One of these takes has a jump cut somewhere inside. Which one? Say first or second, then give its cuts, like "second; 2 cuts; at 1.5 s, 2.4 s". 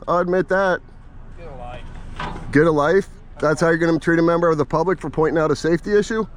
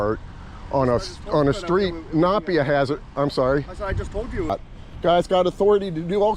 second; 1 cut; at 4.5 s